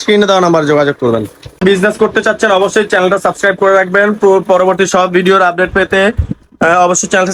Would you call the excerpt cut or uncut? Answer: uncut